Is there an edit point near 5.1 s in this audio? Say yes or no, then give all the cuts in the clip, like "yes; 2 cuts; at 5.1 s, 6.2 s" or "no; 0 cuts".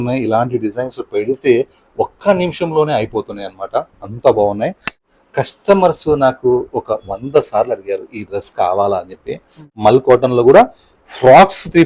yes; 2 cuts; at 5.1 s, 9.6 s